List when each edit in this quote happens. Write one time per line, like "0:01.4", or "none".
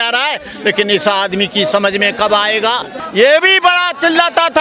0:03.0